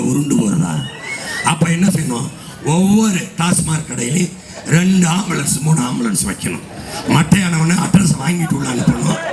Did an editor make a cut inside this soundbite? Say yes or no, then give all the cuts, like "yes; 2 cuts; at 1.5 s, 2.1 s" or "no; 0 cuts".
no; 0 cuts